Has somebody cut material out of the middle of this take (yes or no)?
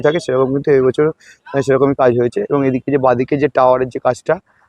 no